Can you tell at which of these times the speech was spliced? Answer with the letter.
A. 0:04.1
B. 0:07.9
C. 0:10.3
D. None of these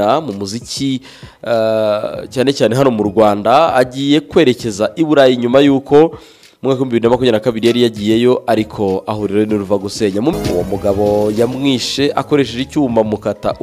C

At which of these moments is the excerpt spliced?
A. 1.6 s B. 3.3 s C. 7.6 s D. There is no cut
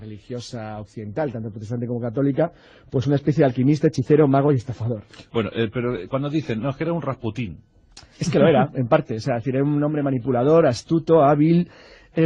B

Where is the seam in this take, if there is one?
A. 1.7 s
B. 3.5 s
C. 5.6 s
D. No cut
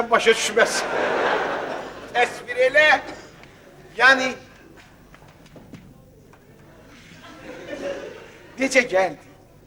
D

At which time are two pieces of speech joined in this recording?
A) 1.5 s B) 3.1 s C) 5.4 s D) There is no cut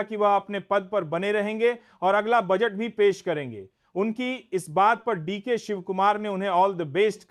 D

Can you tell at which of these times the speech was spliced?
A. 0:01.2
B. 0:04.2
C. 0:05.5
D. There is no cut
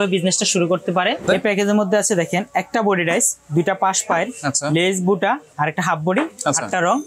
A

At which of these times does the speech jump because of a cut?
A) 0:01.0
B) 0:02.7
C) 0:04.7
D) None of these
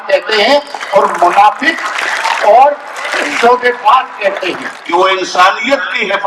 C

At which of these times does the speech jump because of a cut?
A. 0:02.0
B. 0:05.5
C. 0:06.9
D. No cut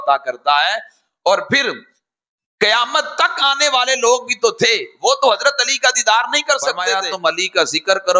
C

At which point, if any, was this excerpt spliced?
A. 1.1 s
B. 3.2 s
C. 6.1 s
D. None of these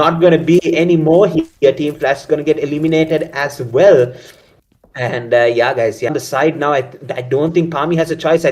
C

